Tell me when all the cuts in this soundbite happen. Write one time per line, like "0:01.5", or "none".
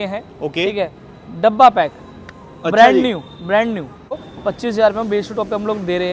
0:04.2